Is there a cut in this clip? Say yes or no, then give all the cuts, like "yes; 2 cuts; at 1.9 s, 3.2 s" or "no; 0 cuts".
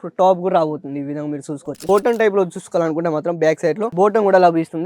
yes; 1 cut; at 1.8 s